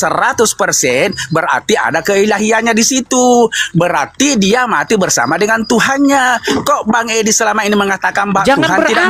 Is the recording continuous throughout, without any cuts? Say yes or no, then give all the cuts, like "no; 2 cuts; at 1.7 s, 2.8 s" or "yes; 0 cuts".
yes; 0 cuts